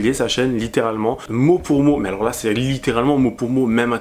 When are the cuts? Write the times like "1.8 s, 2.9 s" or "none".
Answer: 1.3 s